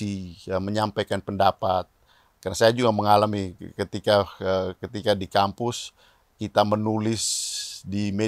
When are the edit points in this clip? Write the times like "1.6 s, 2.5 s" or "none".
none